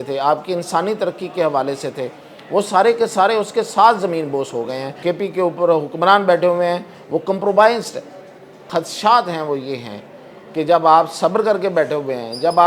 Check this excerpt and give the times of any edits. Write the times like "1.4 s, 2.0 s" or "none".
5.0 s, 8.6 s